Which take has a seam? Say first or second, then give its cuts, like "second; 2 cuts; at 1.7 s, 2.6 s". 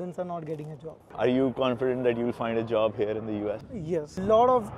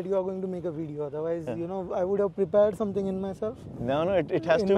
first; 2 cuts; at 1.0 s, 3.7 s